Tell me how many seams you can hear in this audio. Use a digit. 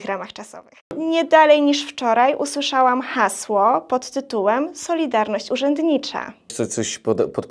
2